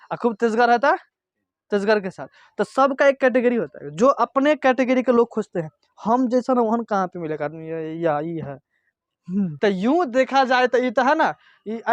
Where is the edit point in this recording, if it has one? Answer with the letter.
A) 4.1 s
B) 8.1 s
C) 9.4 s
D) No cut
C